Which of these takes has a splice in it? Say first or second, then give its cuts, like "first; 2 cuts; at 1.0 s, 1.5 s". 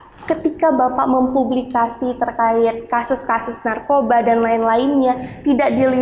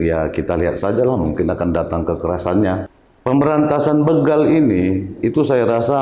second; 1 cut; at 2.9 s